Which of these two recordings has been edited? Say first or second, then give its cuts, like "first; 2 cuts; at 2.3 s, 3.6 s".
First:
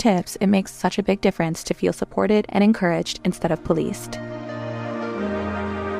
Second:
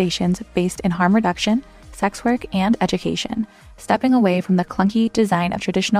first; 1 cut; at 4.1 s